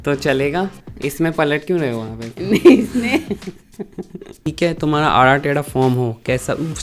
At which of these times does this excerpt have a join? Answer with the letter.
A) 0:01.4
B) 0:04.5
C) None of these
B